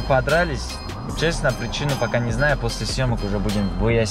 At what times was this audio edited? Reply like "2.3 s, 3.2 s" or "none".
none